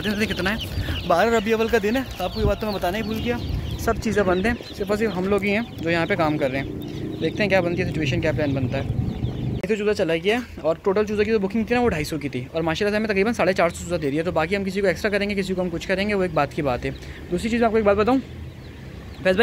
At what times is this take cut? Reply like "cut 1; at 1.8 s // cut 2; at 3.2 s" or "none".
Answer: cut 1; at 9.5 s